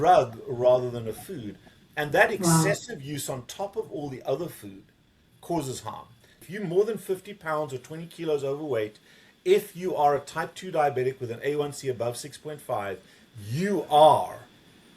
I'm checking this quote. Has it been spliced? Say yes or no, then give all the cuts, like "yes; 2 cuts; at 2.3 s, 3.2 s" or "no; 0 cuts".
yes; 1 cut; at 6.4 s